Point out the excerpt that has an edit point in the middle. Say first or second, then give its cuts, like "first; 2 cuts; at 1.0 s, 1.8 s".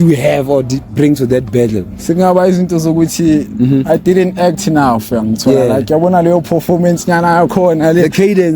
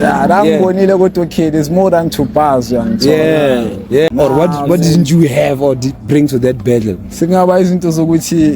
second; 1 cut; at 4.1 s